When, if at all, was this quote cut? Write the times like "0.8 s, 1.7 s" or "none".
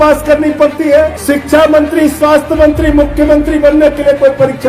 1.2 s